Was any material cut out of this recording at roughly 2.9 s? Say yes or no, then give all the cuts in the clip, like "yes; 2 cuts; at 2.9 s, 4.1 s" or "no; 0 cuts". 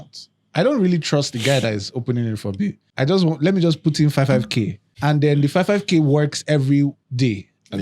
yes; 2 cuts; at 2.9 s, 4.8 s